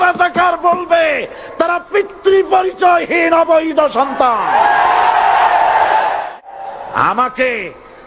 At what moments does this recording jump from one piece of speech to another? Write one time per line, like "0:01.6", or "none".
0:06.3